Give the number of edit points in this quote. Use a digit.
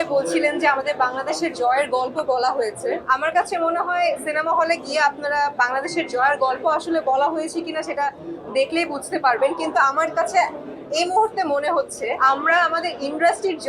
2